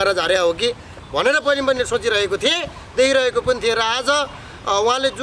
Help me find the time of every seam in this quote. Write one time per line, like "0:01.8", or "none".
none